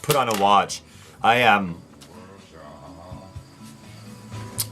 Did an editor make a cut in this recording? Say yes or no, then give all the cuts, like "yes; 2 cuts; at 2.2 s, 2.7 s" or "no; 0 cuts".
yes; 1 cut; at 3.1 s